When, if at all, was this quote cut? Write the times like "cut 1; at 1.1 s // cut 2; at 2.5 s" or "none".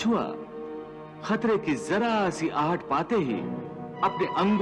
none